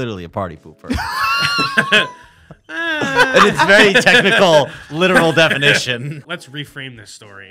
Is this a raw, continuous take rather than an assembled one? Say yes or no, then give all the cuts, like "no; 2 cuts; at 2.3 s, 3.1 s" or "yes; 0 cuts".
no; 1 cut; at 6.2 s